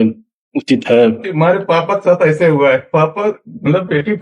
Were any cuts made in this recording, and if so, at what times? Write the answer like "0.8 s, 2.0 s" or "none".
1.2 s, 2.8 s